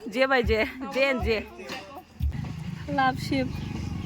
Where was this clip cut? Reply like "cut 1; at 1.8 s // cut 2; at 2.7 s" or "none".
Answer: cut 1; at 2.3 s